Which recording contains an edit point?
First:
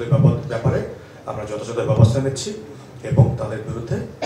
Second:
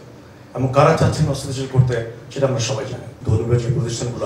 second; 1 cut; at 3.2 s

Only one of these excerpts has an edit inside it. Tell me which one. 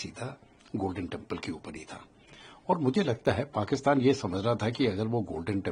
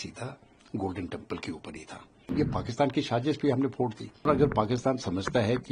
second; 2 cuts; at 2.3 s, 4.3 s

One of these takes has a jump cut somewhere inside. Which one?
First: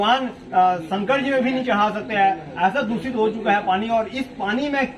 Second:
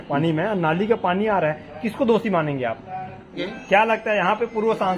second; 1 cut; at 3.3 s

